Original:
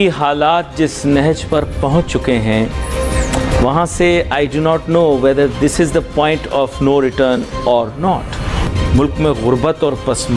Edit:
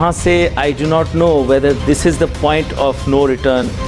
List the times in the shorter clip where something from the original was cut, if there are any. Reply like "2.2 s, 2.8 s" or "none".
none